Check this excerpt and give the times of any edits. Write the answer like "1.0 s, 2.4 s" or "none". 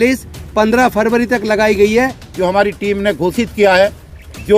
2.2 s